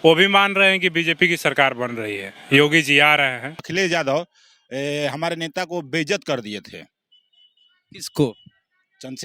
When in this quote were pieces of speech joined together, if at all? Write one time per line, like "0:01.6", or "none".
0:03.6